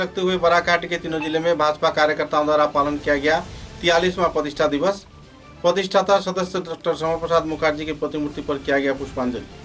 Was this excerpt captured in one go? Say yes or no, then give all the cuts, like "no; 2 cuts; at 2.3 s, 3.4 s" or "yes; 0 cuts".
yes; 0 cuts